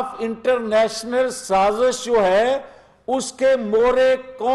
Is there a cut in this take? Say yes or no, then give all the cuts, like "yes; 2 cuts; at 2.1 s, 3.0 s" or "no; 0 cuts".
no; 0 cuts